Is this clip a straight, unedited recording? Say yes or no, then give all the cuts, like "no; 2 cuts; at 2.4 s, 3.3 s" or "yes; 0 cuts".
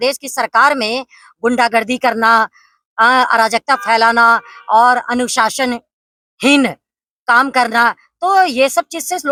yes; 0 cuts